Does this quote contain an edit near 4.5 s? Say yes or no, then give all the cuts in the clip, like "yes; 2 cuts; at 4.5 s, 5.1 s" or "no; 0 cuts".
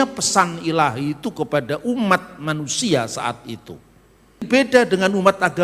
yes; 1 cut; at 4.5 s